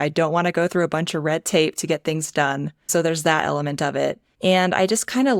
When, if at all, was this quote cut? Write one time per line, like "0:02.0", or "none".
0:02.7
0:04.3